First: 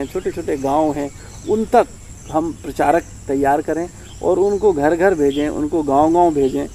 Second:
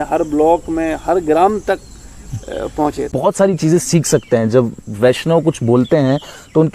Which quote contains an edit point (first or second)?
second